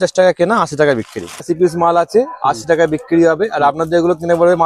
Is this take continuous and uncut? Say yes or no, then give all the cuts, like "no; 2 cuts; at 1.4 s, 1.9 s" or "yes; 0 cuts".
no; 1 cut; at 1.4 s